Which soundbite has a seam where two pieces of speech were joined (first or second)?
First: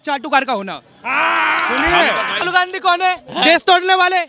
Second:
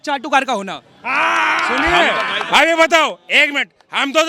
first